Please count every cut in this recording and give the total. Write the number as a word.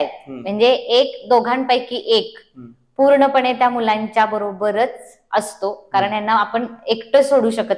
zero